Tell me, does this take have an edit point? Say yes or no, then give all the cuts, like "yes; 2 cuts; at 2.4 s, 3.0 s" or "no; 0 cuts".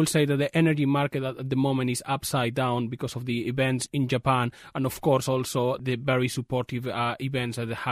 no; 0 cuts